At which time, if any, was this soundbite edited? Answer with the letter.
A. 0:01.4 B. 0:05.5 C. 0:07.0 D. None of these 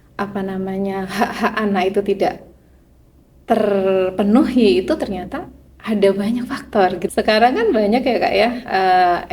C